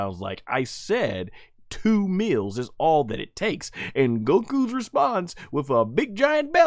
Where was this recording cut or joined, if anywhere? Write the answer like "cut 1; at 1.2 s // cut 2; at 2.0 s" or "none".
none